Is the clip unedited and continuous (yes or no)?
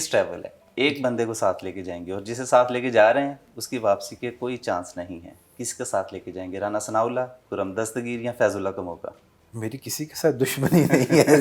yes